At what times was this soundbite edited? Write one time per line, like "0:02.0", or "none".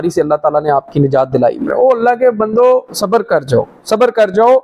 0:01.7